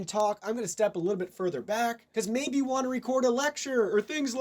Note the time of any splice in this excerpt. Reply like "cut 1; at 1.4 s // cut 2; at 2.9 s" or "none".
cut 1; at 2.0 s